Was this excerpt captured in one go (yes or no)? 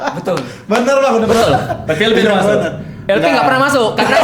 no